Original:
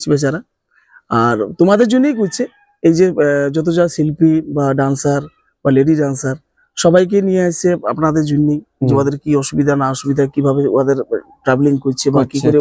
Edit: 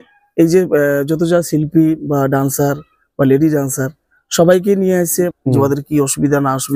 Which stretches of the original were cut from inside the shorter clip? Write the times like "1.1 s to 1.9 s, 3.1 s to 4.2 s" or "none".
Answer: 7.8 s to 8.7 s